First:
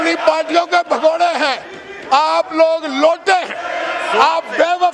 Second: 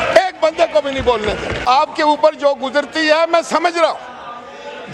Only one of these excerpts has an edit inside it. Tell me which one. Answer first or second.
second